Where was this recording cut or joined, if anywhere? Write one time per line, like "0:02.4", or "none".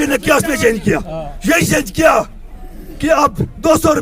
none